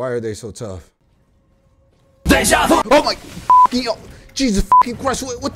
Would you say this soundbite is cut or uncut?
uncut